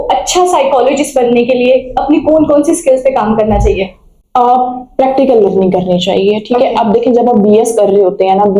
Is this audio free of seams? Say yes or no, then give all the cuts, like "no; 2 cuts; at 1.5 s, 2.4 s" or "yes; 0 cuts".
yes; 0 cuts